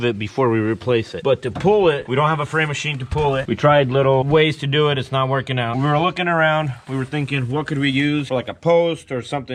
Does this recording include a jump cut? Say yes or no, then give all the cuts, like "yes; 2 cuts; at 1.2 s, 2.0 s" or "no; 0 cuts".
no; 0 cuts